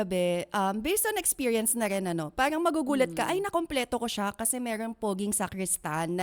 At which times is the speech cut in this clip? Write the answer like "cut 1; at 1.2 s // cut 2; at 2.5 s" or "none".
none